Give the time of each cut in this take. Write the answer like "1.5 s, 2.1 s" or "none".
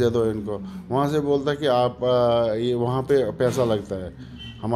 none